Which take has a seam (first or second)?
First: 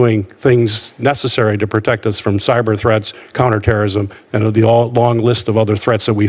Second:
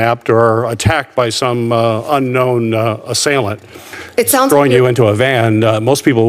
second